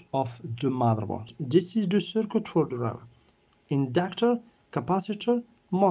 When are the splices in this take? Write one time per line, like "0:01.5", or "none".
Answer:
0:01.3